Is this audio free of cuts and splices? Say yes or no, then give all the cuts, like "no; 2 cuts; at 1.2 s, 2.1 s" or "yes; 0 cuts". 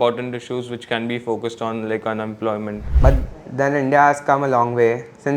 no; 1 cut; at 2.9 s